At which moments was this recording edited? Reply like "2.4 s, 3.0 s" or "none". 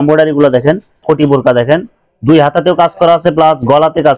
0.9 s